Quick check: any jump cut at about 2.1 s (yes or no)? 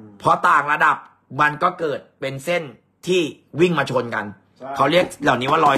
no